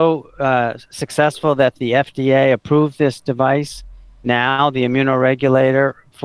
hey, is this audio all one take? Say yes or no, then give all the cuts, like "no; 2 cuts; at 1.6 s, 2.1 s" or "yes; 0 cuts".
yes; 0 cuts